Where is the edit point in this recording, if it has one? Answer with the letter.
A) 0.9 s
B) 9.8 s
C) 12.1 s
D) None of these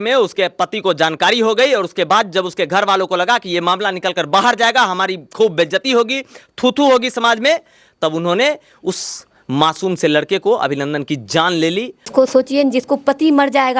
C